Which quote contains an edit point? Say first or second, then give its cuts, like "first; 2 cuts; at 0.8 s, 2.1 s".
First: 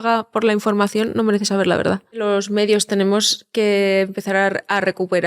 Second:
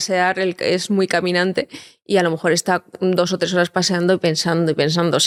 first; 1 cut; at 2.2 s